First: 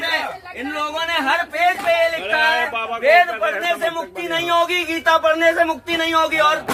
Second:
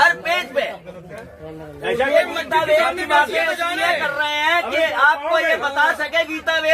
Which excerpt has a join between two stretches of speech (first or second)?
second